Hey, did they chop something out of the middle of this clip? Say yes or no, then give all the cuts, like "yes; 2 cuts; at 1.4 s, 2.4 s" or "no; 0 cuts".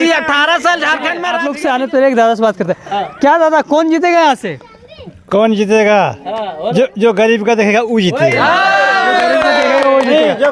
yes; 1 cut; at 1.4 s